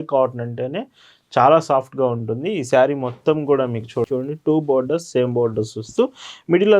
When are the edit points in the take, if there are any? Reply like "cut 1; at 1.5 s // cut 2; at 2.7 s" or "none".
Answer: cut 1; at 4.1 s